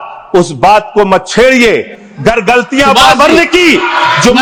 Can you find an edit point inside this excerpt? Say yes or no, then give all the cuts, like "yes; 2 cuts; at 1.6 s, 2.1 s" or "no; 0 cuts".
no; 0 cuts